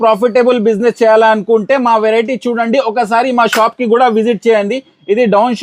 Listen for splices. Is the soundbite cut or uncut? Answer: uncut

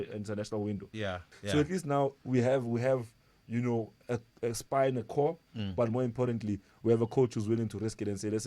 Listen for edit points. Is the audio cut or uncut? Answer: cut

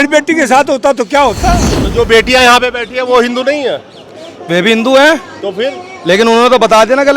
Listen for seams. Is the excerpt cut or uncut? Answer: cut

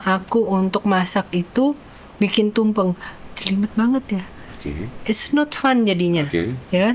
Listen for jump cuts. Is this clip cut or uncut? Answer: uncut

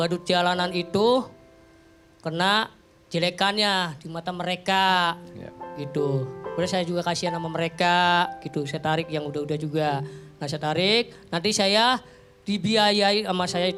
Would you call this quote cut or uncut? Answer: uncut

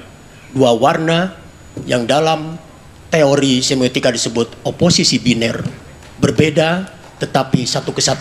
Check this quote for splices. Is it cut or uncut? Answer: uncut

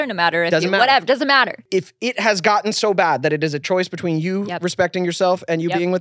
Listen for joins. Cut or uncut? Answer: cut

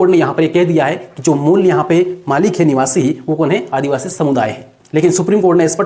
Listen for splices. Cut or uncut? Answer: cut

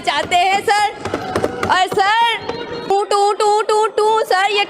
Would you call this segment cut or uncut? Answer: cut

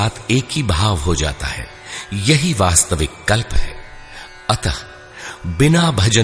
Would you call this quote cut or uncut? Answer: uncut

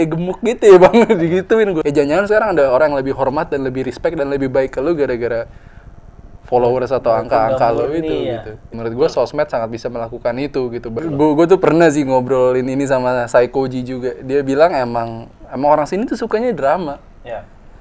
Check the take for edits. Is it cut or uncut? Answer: cut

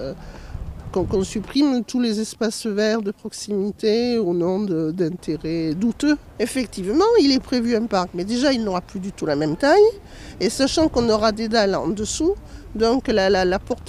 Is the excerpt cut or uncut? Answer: uncut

